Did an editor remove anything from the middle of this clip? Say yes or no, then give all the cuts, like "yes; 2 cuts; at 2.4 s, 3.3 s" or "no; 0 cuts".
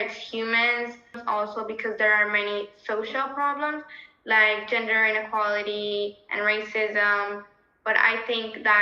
yes; 1 cut; at 1.2 s